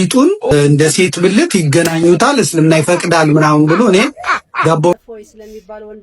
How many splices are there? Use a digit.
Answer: 1